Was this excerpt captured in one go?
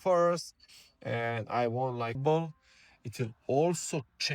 no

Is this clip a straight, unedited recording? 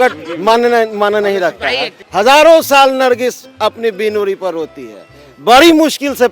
yes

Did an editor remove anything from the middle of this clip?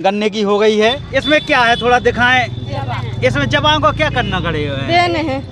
yes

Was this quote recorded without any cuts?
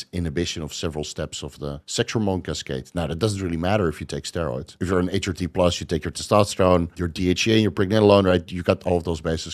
no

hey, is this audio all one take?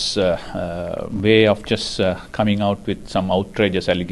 no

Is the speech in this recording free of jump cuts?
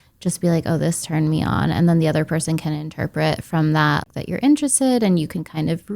no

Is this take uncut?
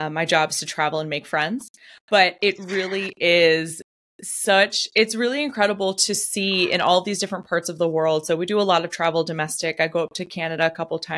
yes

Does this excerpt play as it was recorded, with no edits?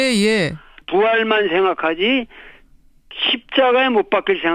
no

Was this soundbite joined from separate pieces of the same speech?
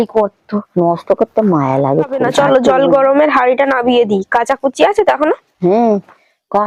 no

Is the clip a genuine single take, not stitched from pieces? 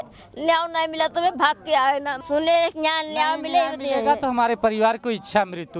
no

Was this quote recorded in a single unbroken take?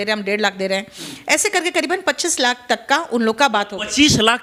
yes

